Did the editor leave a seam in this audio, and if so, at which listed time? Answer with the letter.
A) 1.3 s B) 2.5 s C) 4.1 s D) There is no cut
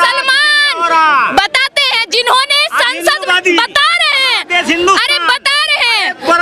D